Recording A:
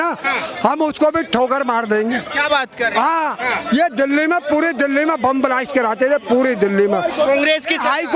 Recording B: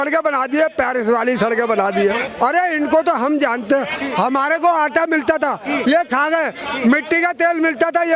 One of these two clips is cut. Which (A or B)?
B